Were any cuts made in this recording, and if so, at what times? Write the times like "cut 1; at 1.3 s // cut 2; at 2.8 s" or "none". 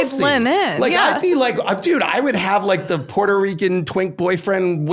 none